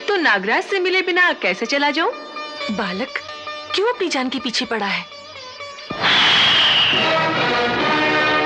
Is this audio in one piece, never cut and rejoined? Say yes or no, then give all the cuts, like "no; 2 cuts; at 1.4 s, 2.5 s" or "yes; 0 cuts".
yes; 0 cuts